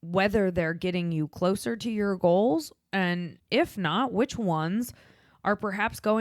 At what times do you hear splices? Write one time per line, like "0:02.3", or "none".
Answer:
0:03.3